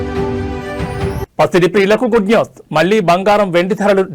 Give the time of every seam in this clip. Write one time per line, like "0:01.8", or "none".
0:01.2